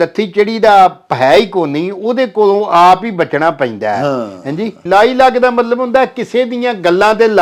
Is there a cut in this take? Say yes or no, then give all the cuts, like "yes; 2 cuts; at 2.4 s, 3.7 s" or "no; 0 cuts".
yes; 1 cut; at 4.8 s